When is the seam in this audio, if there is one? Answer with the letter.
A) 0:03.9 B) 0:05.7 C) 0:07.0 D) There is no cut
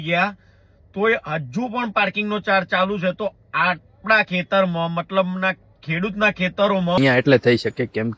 C